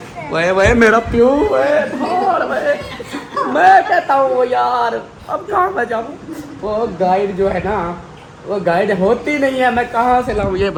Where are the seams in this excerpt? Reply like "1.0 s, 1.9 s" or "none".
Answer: none